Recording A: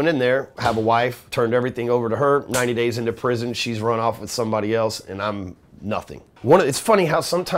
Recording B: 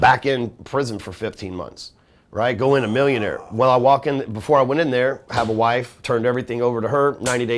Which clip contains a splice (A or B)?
A